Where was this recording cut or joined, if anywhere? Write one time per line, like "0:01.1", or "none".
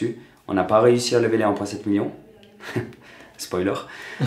none